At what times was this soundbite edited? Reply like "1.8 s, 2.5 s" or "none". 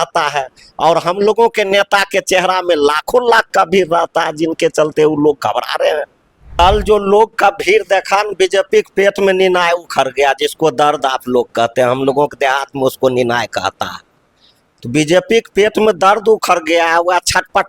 6.5 s